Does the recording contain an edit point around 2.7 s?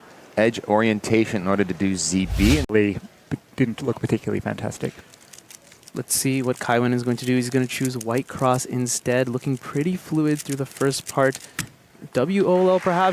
yes; 1 cut; at 2.7 s

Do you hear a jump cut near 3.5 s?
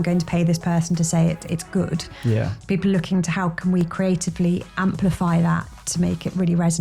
no; 0 cuts

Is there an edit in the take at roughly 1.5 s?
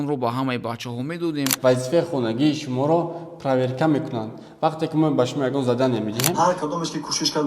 yes; 2 cuts; at 1.5 s, 6.3 s

